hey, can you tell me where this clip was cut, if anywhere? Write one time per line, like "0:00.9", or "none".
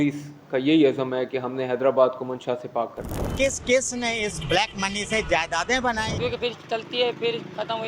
0:03.3
0:06.1